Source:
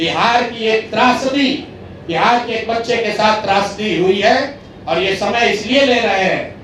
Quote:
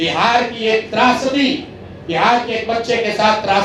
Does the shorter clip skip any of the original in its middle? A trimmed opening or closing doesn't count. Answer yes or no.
no